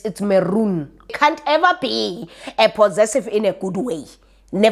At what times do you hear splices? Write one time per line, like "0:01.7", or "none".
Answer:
0:01.0